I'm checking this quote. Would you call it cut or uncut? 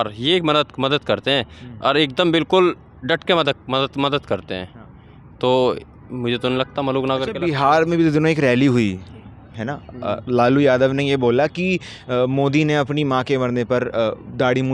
uncut